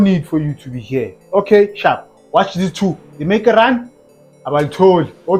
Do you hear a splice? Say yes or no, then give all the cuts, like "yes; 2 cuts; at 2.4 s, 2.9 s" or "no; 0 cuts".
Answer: no; 0 cuts